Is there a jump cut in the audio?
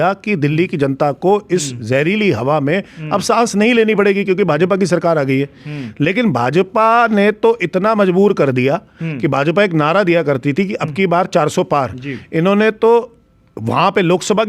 no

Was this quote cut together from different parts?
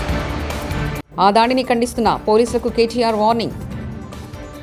no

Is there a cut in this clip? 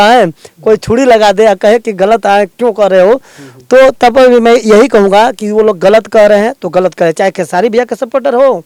no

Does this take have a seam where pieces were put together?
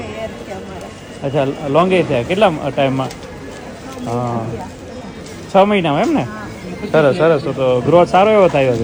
no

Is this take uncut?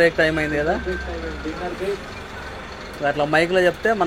yes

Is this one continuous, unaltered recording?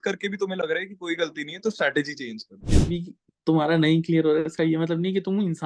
no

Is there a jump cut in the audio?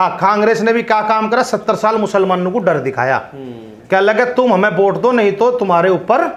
no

